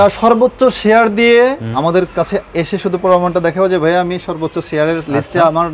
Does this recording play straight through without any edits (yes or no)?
no